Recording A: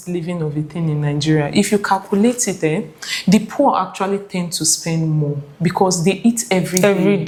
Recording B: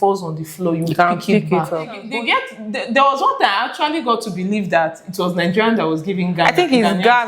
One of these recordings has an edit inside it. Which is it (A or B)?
B